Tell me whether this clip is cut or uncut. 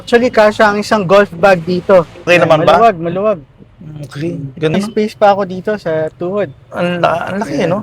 cut